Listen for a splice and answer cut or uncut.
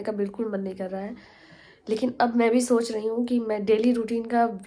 uncut